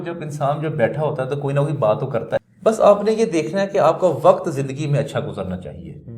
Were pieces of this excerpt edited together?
yes; 1 cut; at 2.5 s

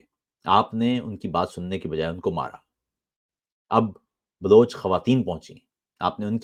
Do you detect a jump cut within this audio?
no; 0 cuts

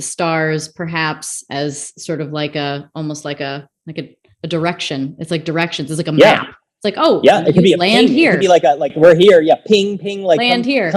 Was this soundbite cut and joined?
no; 0 cuts

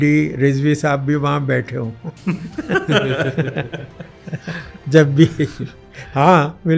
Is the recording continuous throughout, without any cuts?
yes; 0 cuts

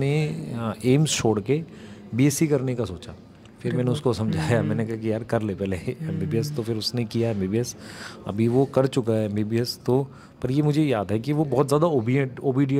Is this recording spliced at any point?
no; 0 cuts

